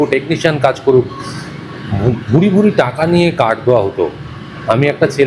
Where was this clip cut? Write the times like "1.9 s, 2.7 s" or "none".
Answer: none